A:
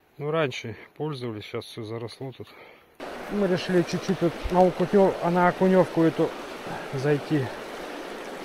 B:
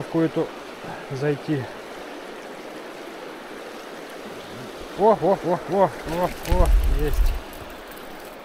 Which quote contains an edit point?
A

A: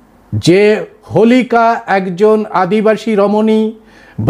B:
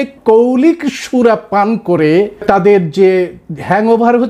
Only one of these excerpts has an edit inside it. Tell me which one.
B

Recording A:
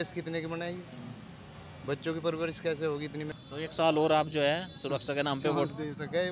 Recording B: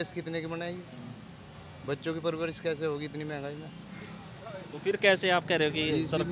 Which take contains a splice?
A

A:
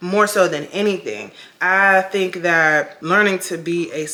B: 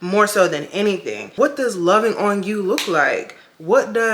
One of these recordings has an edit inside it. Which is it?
B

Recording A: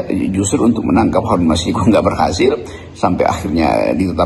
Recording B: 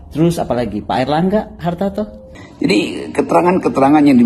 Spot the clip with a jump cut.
B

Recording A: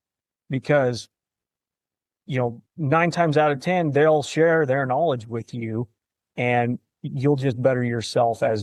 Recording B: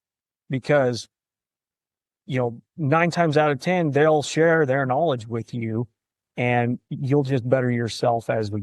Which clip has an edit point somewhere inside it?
B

